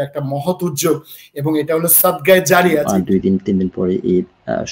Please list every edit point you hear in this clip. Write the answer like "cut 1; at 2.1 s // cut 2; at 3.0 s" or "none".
cut 1; at 2.9 s